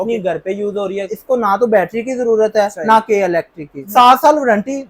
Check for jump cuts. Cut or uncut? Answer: cut